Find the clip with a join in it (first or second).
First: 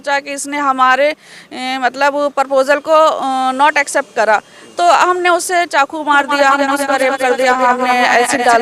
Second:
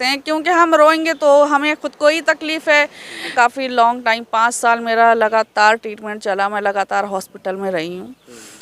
second